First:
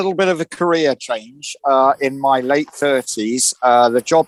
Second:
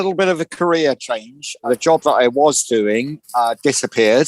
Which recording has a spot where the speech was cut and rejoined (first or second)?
second